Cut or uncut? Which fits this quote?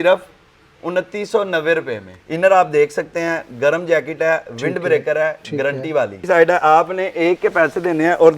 cut